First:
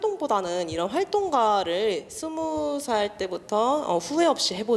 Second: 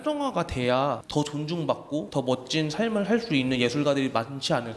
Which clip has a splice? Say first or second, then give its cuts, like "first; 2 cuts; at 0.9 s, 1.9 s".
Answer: second; 2 cuts; at 1.0 s, 2.1 s